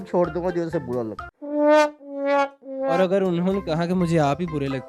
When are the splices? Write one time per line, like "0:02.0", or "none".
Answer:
none